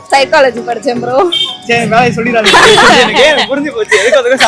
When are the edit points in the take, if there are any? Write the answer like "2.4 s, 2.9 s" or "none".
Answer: none